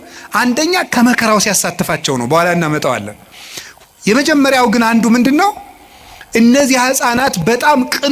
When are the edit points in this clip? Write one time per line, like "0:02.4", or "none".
none